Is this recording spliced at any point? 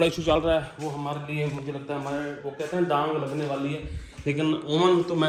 no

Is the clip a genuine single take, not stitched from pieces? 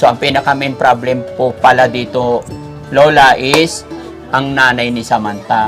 yes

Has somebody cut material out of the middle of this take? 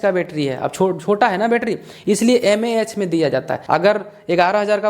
yes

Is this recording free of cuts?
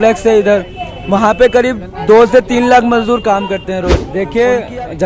no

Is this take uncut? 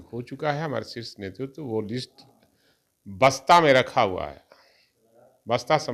yes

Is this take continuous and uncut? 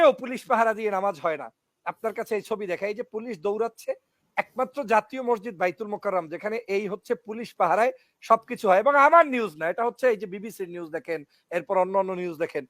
yes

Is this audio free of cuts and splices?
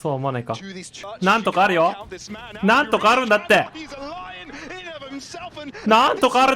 no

